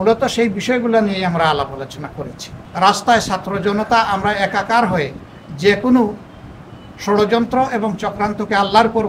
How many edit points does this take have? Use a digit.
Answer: 1